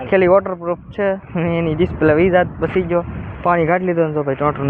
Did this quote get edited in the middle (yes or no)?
no